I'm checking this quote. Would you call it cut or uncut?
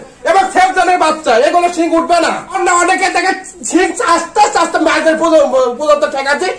cut